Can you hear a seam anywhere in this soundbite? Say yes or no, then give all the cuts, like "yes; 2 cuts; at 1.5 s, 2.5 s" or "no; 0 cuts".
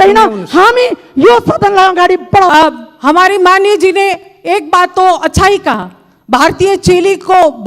yes; 1 cut; at 2.5 s